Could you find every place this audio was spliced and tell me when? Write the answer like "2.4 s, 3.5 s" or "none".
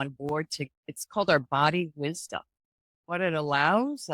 3.0 s